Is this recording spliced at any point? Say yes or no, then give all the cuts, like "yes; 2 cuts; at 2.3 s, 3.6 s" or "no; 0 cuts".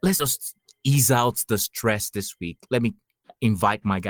no; 0 cuts